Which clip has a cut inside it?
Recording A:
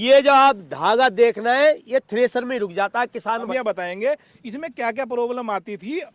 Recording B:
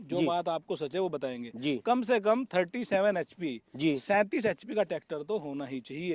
A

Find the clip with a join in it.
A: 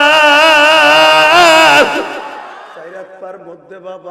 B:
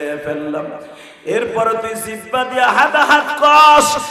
A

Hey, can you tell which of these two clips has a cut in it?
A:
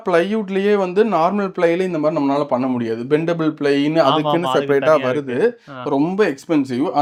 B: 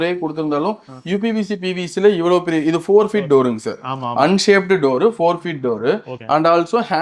B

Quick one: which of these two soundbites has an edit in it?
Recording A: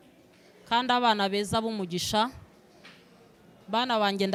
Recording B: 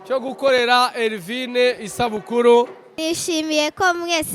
B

